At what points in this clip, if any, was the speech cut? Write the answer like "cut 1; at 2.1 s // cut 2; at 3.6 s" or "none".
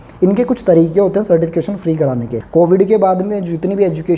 cut 1; at 2.4 s